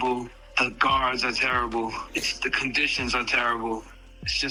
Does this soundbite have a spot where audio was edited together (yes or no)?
no